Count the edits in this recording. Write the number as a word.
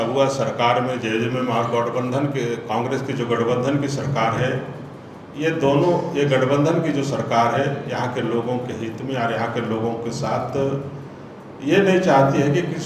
zero